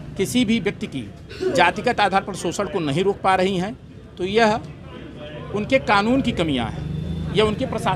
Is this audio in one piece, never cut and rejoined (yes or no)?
yes